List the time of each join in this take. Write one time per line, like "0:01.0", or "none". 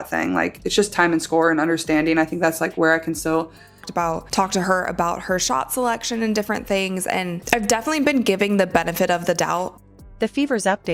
none